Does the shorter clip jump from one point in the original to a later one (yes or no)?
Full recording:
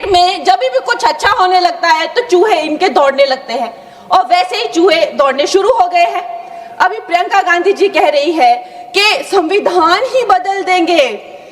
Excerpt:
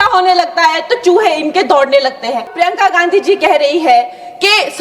yes